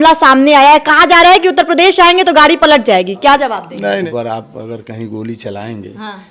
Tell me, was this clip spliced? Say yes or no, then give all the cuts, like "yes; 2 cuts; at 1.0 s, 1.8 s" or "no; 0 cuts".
yes; 1 cut; at 4.1 s